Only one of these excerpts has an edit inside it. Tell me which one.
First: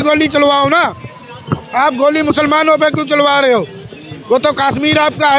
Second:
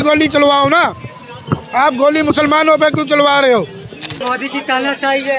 second; 1 cut; at 4.1 s

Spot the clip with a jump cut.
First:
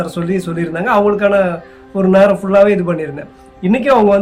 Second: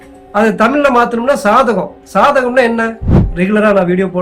second; 1 cut; at 3.2 s

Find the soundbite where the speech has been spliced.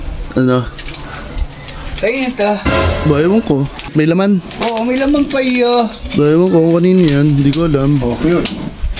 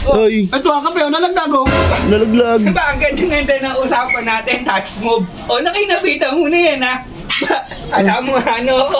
first; 1 cut; at 3.9 s

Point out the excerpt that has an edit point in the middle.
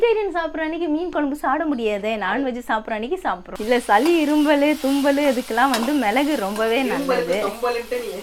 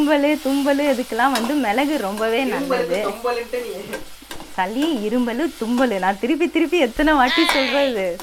first; 1 cut; at 3.5 s

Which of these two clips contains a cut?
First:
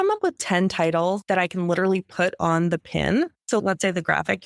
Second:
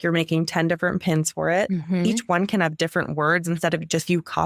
first; 2 cuts; at 1.2 s, 3.4 s

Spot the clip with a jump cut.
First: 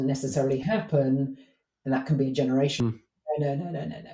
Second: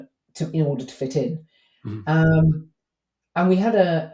first; 1 cut; at 2.8 s

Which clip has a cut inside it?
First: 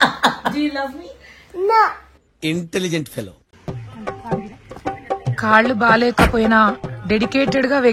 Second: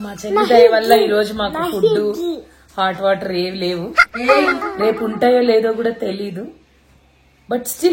first; 1 cut; at 3.4 s

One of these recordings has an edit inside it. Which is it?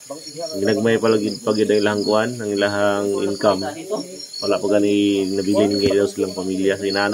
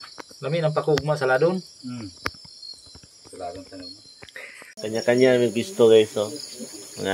second; 1 cut; at 4.8 s

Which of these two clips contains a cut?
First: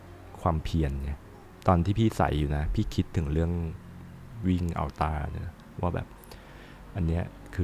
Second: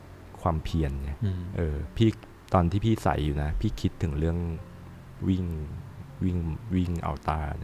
first; 2 cuts; at 1.4 s, 4.3 s

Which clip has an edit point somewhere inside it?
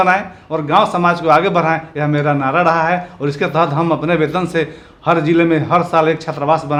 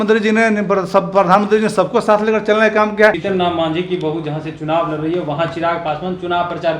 second; 1 cut; at 3.2 s

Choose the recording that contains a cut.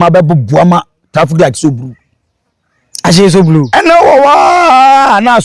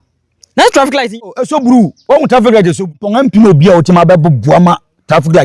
second; 2 cuts; at 1.3 s, 3.0 s

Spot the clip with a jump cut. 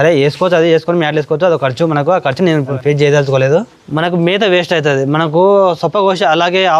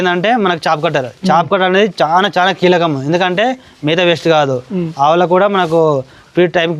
first; 2 cuts; at 2.7 s, 3.7 s

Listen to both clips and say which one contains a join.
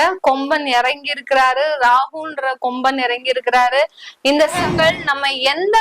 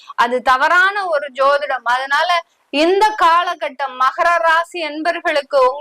first; 1 cut; at 4.5 s

